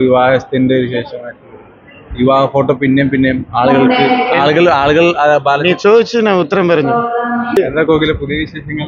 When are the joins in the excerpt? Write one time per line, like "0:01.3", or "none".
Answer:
0:07.6